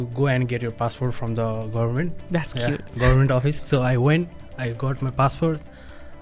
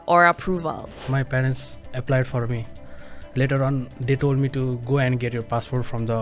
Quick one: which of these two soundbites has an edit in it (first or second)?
second